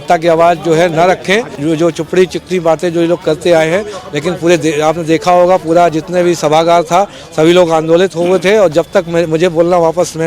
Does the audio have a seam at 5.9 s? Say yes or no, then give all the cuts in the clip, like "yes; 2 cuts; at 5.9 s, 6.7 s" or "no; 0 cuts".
no; 1 cut; at 1.5 s